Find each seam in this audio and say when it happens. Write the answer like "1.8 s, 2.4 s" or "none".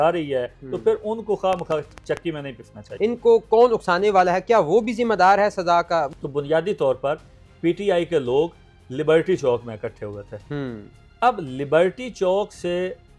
2.8 s, 6.1 s